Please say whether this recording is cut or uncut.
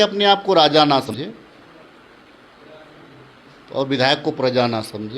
cut